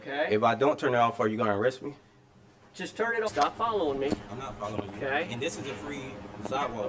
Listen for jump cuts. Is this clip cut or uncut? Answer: cut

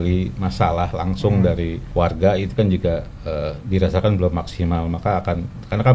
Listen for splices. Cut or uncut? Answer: cut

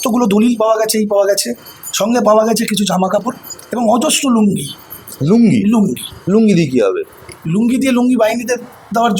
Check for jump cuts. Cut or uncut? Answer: uncut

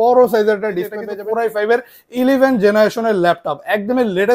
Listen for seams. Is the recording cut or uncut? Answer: cut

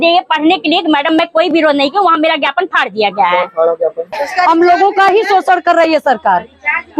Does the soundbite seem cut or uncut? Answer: cut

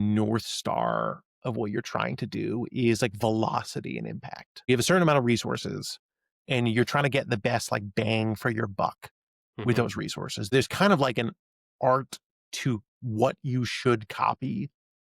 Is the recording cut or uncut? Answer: cut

